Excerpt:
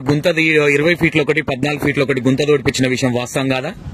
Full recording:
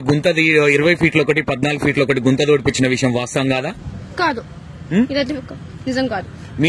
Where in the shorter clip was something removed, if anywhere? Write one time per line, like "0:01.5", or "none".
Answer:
none